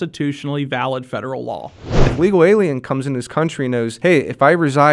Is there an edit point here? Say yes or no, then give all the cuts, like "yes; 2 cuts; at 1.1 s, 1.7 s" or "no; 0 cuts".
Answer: yes; 2 cuts; at 2.0 s, 3.9 s